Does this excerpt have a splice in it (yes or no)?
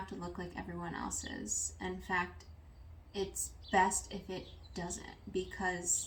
no